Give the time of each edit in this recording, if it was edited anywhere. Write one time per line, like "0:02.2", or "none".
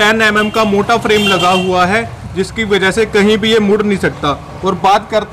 none